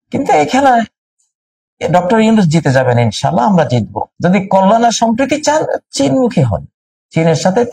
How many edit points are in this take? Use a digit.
1